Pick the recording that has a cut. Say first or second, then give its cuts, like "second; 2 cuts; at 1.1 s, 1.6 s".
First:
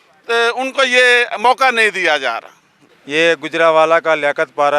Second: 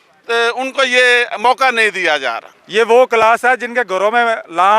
second; 1 cut; at 2.5 s